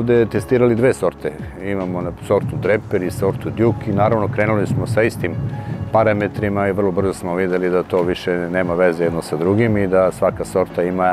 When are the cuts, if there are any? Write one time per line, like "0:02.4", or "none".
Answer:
none